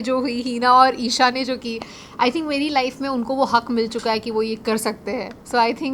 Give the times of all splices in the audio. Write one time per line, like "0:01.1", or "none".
none